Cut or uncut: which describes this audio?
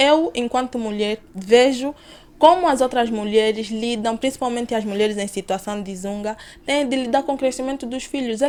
uncut